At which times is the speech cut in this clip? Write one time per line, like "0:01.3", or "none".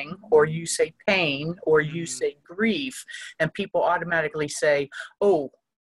none